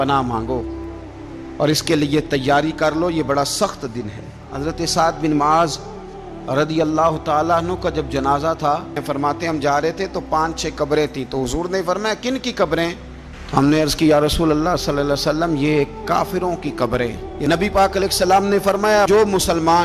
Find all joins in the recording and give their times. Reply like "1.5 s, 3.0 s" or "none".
4.5 s, 9.0 s, 17.3 s

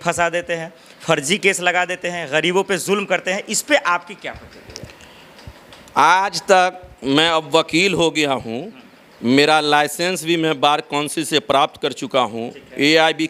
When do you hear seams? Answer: none

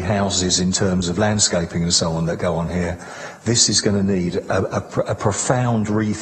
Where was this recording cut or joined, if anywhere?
none

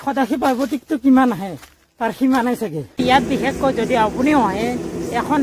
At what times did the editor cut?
3.0 s

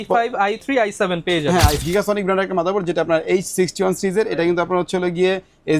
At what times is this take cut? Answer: 1.8 s

